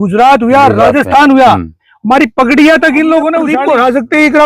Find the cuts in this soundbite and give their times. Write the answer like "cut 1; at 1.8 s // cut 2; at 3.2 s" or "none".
cut 1; at 3.5 s